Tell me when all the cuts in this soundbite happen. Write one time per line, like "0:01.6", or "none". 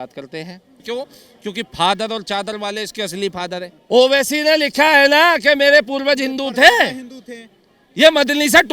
0:00.8
0:03.7